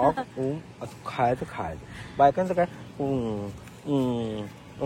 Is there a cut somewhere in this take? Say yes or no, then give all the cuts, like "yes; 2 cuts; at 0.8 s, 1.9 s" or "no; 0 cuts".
no; 0 cuts